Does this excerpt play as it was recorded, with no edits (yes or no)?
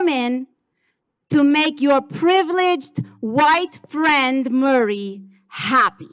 yes